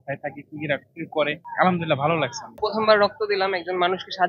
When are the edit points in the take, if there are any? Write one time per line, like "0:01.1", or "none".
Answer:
0:01.4
0:02.6

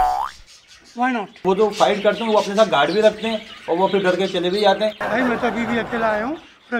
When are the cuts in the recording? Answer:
0:01.4
0:05.0

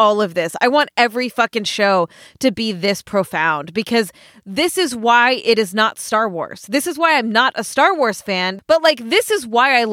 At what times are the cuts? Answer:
0:08.5

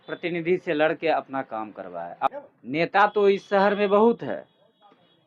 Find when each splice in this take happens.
0:02.3

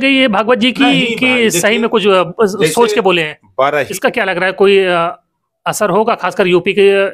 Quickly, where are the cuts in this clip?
0:03.9

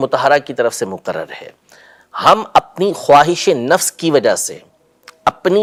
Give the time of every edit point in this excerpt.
none

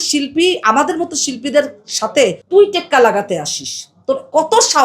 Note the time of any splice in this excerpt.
none

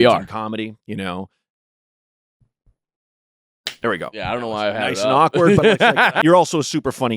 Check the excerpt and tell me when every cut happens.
0:06.2

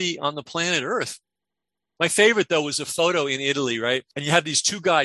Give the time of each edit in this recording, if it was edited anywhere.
0:01.8

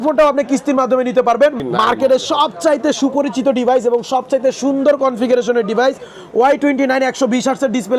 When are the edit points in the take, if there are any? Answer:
0:01.6

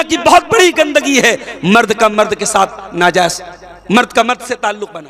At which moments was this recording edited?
none

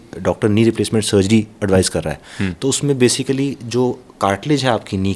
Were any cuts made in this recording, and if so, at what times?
none

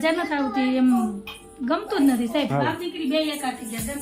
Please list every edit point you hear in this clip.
0:02.5

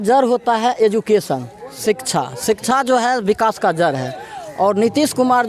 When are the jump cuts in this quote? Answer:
none

